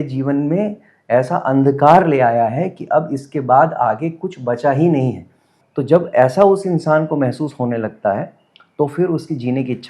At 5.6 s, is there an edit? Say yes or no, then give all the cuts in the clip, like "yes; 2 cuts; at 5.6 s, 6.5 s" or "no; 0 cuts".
yes; 1 cut; at 5.6 s